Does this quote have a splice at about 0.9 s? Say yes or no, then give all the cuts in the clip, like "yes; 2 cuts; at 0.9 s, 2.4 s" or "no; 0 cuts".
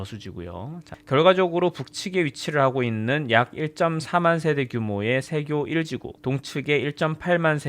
yes; 1 cut; at 0.9 s